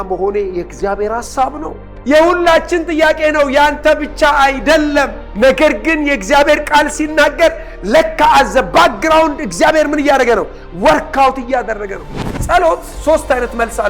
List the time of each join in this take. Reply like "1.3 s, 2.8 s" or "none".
1.9 s